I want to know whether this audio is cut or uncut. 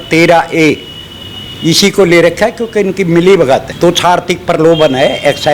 cut